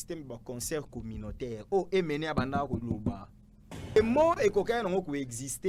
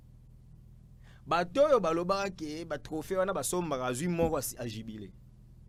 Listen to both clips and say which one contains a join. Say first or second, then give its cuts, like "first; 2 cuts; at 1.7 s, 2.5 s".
first; 1 cut; at 4.0 s